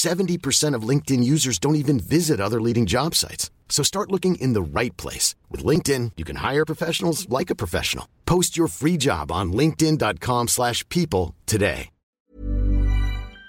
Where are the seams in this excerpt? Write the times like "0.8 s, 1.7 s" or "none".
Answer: 12.1 s